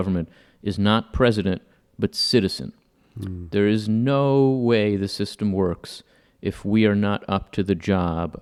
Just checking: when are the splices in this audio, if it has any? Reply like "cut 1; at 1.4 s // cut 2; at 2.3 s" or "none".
none